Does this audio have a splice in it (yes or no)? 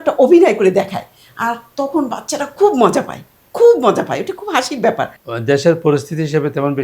yes